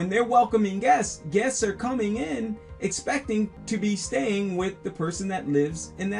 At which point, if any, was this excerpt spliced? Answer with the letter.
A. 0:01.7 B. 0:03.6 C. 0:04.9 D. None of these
B